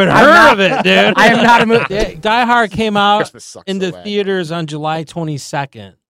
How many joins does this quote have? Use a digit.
1